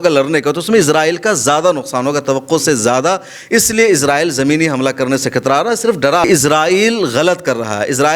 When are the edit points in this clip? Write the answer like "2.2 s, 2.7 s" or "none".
6.2 s